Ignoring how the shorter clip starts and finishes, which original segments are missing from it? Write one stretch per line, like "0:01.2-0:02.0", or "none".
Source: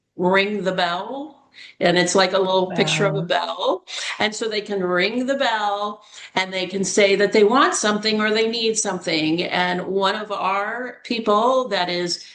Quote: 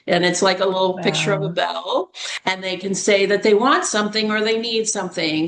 0:04.0-0:06.1